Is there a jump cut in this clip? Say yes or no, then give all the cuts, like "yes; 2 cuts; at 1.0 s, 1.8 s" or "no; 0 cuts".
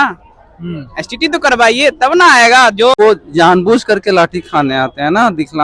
yes; 1 cut; at 3.0 s